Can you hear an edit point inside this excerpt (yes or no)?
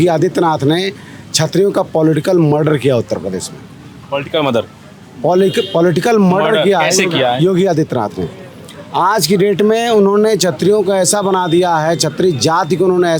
no